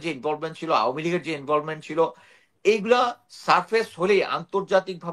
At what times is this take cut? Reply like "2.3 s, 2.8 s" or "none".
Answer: none